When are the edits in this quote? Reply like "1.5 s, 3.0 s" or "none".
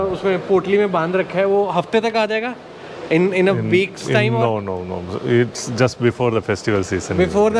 none

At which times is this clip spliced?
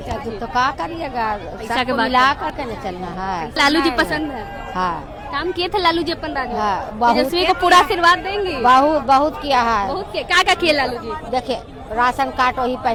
none

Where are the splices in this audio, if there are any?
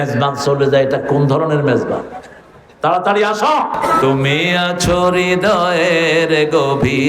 3.9 s

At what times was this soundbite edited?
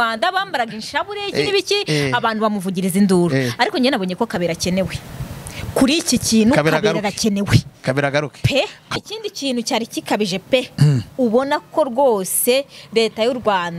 9.0 s

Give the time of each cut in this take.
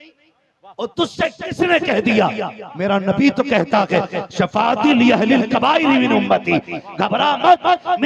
none

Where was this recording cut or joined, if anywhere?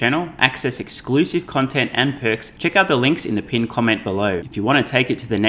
2.5 s, 4.5 s

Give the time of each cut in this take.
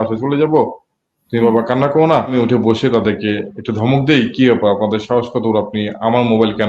2.3 s

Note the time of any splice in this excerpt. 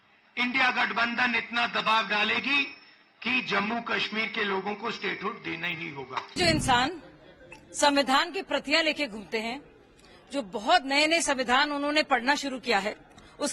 6.3 s

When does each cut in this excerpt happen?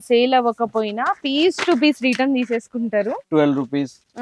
3.2 s

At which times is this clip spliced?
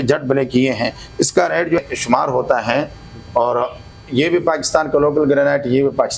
1.8 s

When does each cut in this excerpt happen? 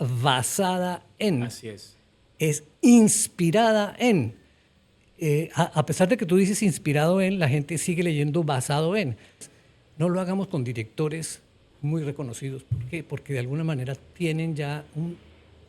9.5 s

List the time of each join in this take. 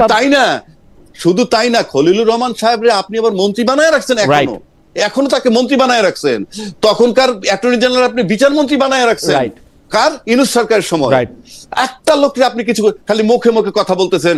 none

